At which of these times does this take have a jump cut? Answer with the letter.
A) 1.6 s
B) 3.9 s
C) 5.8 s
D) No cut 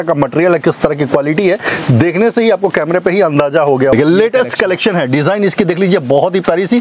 B